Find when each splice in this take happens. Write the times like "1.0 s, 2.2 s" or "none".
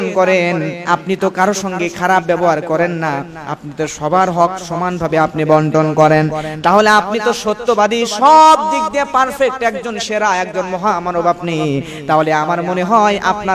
none

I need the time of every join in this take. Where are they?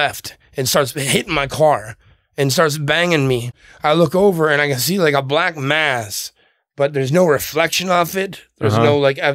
3.5 s

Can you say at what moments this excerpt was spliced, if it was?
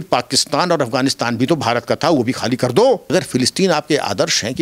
3.0 s

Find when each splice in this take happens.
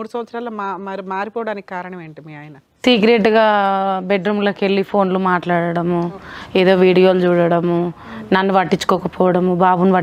none

